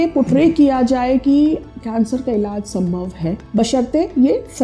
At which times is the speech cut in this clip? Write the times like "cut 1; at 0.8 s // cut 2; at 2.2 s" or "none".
cut 1; at 3.4 s

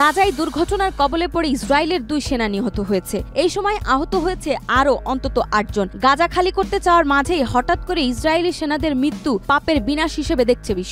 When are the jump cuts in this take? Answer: none

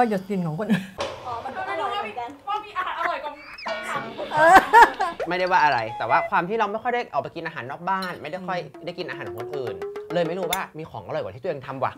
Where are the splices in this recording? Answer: cut 1; at 10.7 s

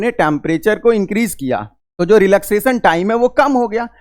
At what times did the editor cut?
cut 1; at 1.8 s

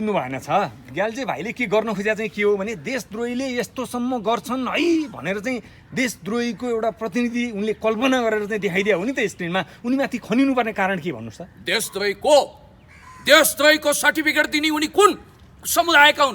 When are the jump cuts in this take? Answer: none

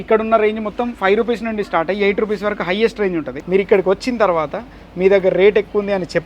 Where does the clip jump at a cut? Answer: cut 1; at 3.3 s

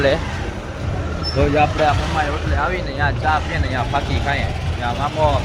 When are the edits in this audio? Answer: none

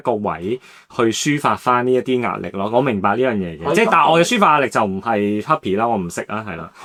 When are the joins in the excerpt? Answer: none

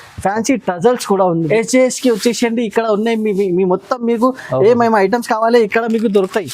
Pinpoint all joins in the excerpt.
cut 1; at 1.5 s

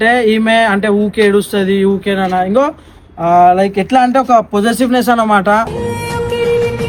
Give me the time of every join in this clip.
none

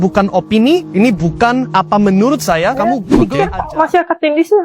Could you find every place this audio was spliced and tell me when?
cut 1; at 3.1 s

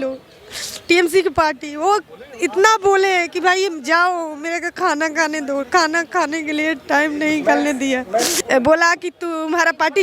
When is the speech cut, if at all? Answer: cut 1; at 8.3 s

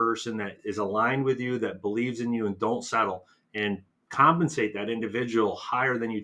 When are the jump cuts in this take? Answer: none

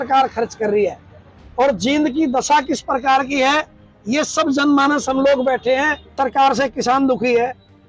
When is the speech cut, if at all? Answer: cut 1; at 6.1 s

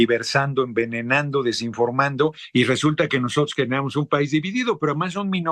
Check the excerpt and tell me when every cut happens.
none

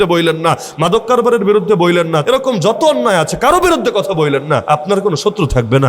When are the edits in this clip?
cut 1; at 2.2 s // cut 2; at 4.6 s

